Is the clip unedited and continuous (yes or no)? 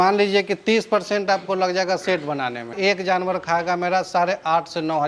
no